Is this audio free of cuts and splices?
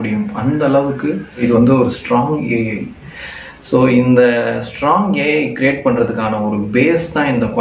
no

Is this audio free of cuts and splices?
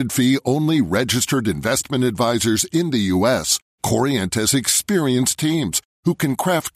yes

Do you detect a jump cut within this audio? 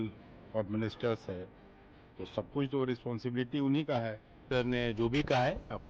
yes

